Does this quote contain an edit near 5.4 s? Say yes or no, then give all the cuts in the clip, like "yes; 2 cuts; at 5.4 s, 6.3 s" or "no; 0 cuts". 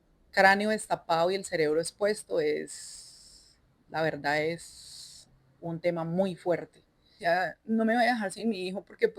no; 1 cut; at 7.1 s